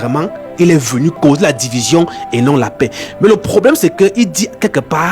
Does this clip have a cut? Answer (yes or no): yes